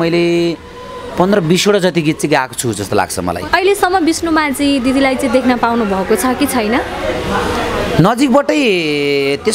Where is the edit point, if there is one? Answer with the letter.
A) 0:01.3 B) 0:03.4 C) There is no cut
B